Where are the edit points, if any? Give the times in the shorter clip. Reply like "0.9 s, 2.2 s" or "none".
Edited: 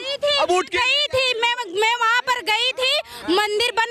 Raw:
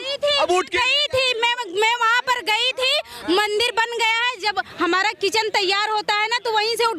none